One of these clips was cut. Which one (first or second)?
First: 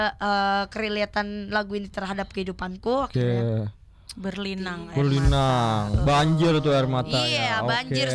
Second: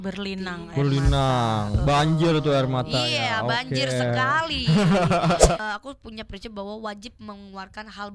second